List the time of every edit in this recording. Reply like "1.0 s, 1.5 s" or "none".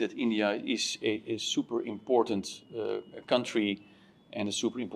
none